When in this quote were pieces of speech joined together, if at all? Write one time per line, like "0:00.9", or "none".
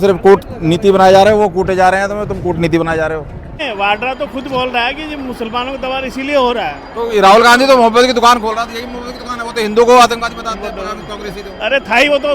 0:03.6